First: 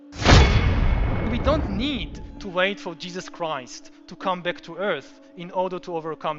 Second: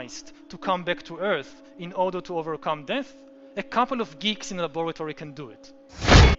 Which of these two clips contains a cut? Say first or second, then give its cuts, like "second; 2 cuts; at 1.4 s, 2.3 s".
first; 1 cut; at 1.2 s